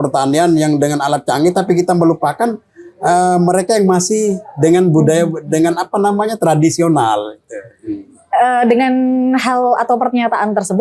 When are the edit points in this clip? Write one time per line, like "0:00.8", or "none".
none